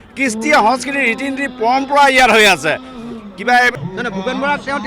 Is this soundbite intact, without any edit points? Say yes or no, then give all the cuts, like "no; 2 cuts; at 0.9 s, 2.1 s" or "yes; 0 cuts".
no; 1 cut; at 3.7 s